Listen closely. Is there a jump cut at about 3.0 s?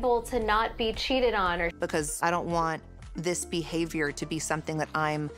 no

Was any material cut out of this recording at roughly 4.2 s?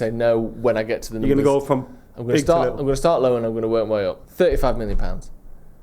yes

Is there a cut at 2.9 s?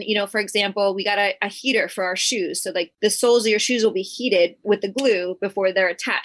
yes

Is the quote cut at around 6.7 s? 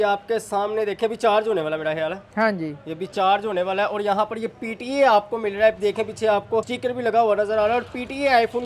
yes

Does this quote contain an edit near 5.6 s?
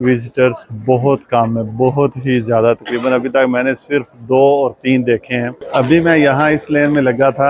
yes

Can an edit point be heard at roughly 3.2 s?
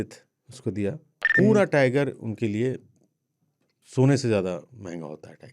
no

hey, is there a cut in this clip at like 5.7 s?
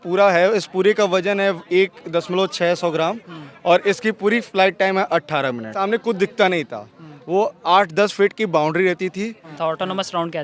yes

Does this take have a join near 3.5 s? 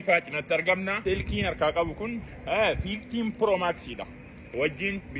no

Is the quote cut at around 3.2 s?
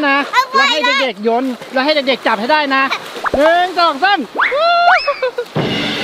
yes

